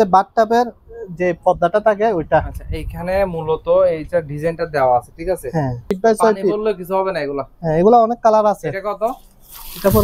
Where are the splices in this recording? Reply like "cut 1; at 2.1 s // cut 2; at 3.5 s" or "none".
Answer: cut 1; at 6.0 s